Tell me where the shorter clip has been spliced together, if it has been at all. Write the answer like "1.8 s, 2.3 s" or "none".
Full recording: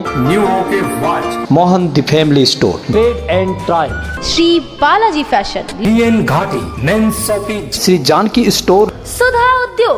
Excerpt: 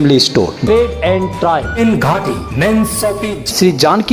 1.8 s